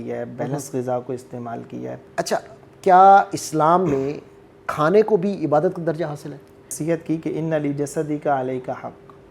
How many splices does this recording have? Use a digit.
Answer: 2